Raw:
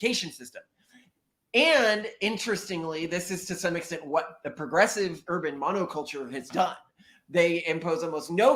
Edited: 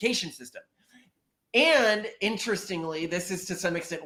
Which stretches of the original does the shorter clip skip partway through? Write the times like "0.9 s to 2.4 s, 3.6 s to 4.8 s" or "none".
none